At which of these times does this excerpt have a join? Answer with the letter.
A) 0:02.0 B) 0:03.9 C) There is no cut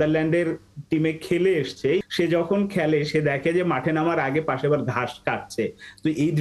A